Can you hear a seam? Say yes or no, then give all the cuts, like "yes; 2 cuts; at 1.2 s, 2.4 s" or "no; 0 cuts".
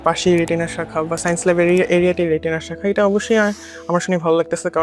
no; 0 cuts